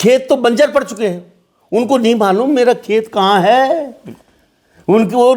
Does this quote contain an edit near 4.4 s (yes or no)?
no